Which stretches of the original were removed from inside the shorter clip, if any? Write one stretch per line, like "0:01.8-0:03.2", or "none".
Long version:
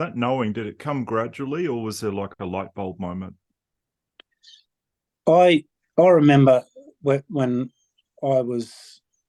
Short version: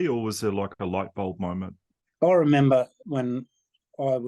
0:03.6-0:05.8
0:06.8-0:07.3